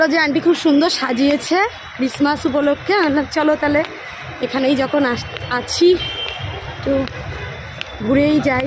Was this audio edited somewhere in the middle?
no; 0 cuts

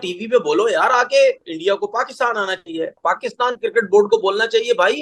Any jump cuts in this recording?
yes; 2 cuts; at 1.5 s, 2.9 s

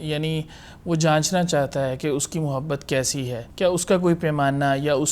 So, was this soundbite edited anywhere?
yes; 1 cut; at 3.4 s

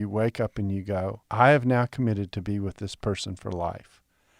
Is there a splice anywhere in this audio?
yes; 1 cut; at 1.2 s

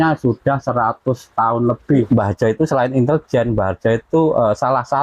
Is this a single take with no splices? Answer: no; 1 cut; at 2.1 s

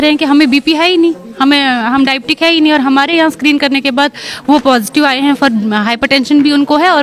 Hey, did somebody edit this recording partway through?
no; 0 cuts

